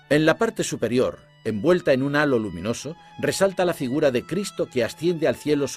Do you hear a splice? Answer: no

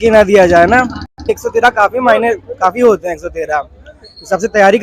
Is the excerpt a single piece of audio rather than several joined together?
no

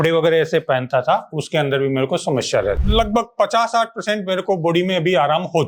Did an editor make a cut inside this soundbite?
yes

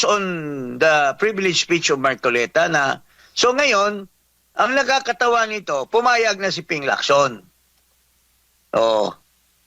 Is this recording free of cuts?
yes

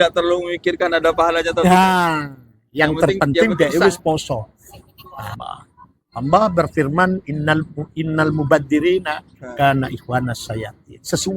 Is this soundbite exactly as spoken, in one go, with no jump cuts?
no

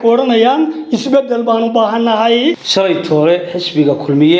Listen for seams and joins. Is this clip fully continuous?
no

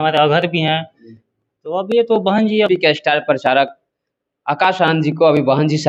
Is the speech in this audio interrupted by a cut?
yes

